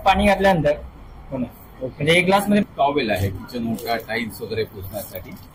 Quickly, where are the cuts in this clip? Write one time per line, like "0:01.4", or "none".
0:02.6